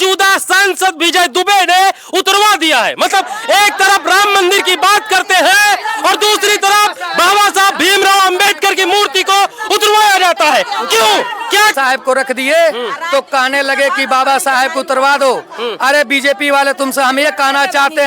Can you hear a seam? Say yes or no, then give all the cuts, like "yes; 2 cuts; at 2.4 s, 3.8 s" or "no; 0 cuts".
yes; 1 cut; at 11.7 s